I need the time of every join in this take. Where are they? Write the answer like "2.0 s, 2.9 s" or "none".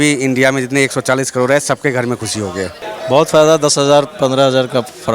2.8 s